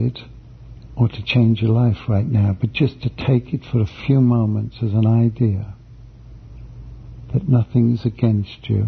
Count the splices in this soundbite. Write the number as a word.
zero